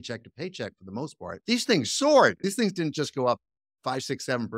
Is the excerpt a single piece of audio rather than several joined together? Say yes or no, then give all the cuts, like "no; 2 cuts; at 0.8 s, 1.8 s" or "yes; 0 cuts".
no; 2 cuts; at 1.4 s, 2.4 s